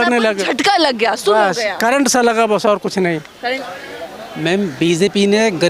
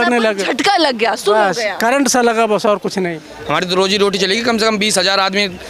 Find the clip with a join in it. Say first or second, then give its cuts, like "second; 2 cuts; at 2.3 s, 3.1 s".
second; 1 cut; at 3.3 s